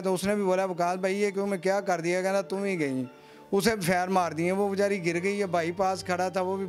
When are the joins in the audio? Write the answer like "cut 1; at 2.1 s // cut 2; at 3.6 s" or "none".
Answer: none

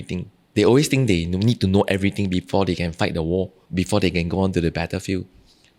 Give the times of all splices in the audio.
cut 1; at 3.6 s

